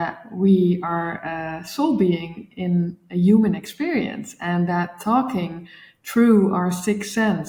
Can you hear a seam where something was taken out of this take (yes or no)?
no